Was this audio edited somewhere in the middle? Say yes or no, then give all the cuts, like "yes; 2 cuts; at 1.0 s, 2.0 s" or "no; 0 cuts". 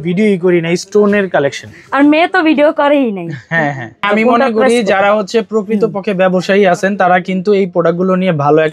yes; 1 cut; at 4.0 s